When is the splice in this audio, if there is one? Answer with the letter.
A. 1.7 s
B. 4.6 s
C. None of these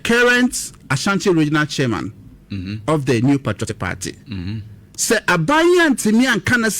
A